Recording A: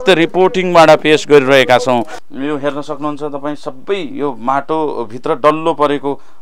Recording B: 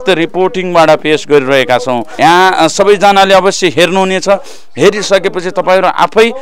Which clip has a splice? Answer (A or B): A